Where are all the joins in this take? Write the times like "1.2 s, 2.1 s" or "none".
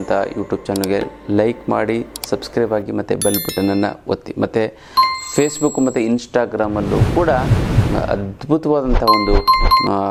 none